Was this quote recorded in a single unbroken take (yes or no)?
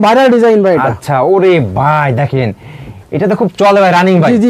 yes